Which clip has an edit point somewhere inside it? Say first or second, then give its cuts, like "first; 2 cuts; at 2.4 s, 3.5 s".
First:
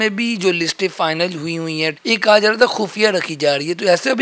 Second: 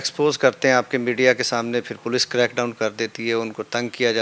first; 1 cut; at 2.0 s